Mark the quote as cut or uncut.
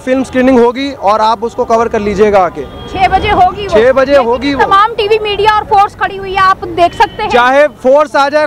uncut